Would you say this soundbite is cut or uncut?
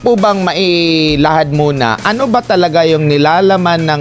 uncut